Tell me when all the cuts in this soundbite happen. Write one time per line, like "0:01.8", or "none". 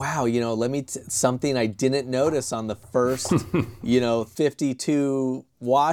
none